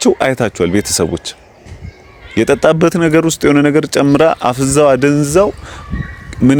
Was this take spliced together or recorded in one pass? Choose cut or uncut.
uncut